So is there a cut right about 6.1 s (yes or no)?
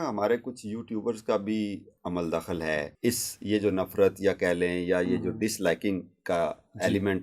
no